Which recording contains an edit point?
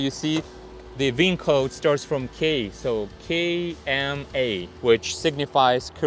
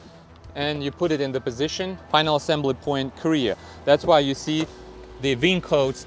second; 1 cut; at 2.0 s

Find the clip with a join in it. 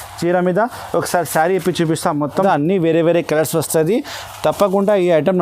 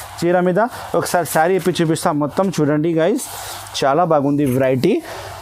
first; 1 cut; at 2.4 s

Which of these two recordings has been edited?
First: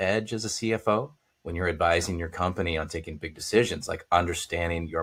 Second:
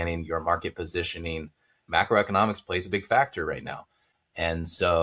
second; 1 cut; at 1.8 s

